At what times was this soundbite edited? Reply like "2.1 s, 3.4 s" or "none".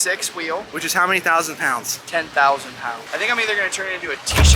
3.0 s